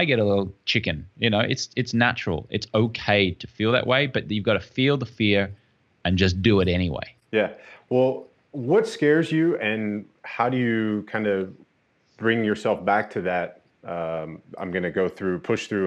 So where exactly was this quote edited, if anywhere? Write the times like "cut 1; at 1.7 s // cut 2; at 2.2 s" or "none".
none